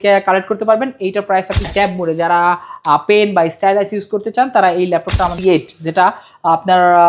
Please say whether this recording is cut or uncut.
cut